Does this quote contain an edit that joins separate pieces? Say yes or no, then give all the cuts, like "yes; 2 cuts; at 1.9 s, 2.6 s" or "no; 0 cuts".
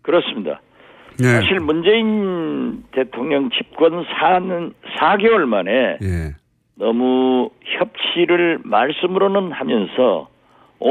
yes; 1 cut; at 4.4 s